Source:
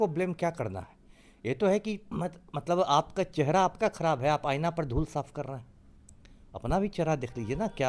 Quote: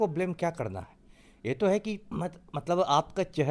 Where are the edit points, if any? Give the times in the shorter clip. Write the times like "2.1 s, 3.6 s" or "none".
none